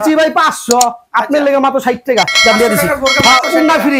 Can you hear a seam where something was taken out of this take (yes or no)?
no